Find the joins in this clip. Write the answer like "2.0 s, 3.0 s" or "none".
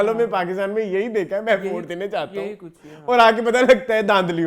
none